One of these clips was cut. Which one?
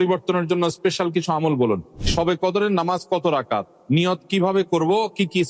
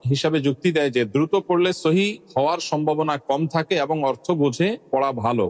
first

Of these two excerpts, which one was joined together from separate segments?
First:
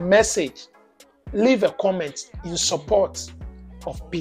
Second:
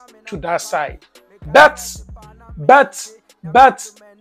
second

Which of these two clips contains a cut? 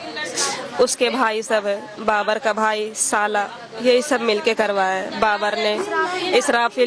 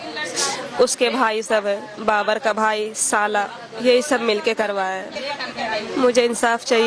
second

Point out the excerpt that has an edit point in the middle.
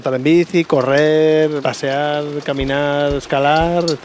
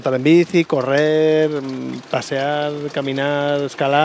first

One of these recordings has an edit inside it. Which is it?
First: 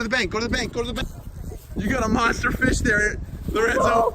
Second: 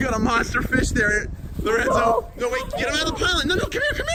first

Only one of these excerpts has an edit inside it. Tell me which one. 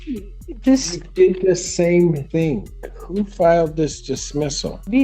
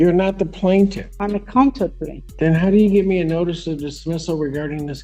first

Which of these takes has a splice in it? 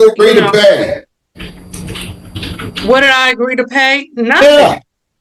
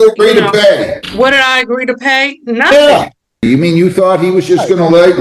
second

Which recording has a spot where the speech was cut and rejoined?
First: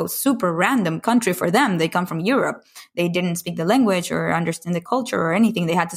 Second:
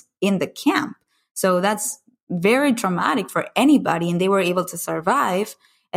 first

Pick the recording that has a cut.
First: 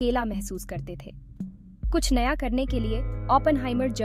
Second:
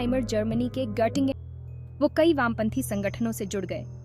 second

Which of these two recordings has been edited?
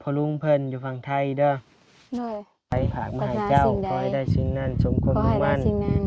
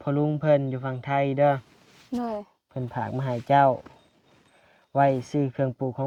first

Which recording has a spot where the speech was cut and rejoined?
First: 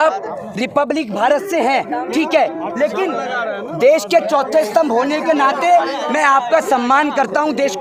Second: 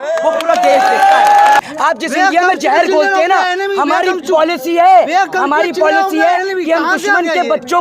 second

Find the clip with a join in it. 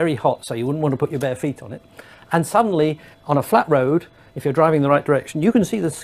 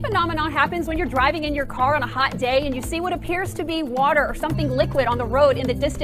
first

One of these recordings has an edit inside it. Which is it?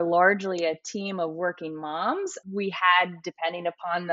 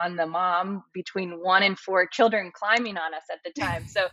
first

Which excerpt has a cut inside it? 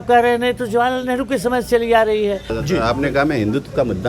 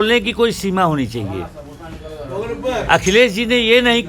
first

